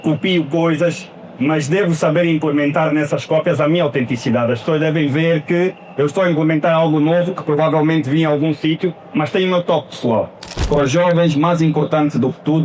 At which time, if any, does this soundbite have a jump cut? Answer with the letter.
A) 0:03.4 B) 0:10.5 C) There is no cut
B